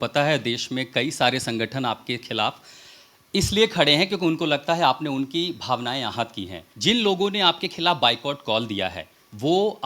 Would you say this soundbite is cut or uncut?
cut